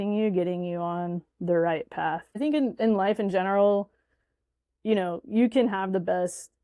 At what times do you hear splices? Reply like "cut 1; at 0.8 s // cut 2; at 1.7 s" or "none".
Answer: cut 1; at 2.3 s